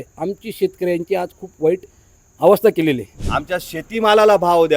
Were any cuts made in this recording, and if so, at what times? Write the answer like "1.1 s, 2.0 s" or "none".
3.1 s